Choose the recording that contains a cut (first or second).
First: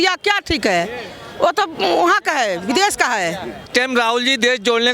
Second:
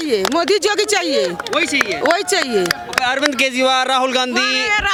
first